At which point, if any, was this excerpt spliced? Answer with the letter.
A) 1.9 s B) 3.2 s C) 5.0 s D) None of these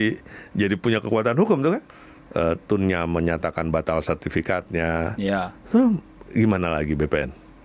A